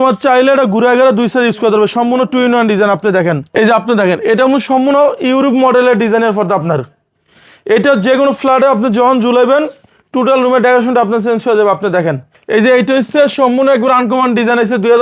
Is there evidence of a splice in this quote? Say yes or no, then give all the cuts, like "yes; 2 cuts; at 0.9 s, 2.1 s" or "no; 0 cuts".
yes; 2 cuts; at 3.4 s, 12.3 s